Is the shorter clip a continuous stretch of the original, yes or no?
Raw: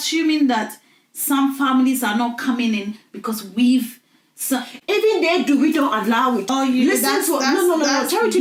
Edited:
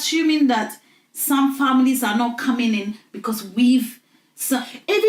yes